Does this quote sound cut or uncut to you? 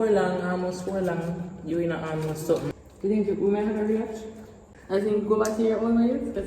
cut